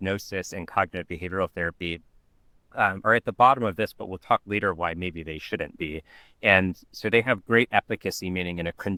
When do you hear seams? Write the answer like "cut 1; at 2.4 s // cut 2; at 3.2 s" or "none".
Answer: none